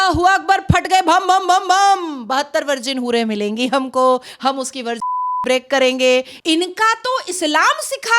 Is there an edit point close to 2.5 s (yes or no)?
no